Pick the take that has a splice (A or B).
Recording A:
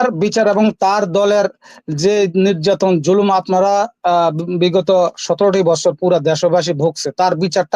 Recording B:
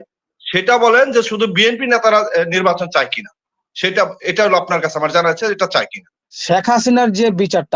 B